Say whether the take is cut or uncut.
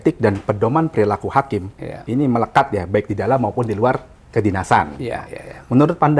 uncut